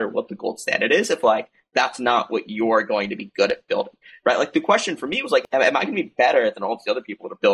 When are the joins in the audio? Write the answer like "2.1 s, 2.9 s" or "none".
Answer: 5.5 s